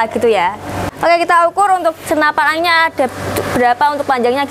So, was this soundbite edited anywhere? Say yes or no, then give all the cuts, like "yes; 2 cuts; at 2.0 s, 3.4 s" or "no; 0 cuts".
no; 0 cuts